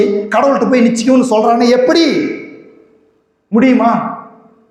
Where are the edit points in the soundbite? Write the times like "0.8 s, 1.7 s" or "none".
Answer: none